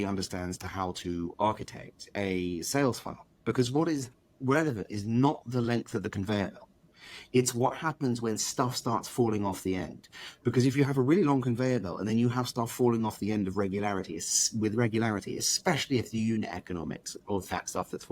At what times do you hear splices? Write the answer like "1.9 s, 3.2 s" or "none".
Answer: none